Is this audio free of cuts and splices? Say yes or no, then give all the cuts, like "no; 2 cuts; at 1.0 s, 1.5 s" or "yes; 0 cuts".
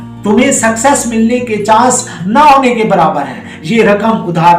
no; 1 cut; at 3.5 s